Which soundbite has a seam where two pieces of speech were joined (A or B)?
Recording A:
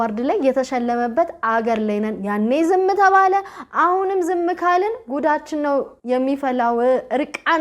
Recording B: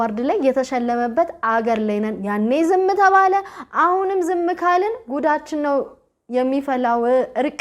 A